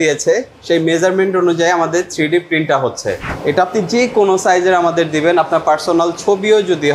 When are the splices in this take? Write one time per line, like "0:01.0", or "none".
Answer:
0:03.3